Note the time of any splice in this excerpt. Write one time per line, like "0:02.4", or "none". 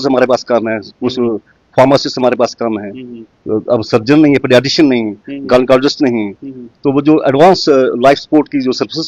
none